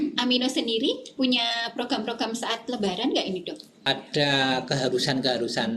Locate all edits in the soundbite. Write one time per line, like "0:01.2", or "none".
0:03.7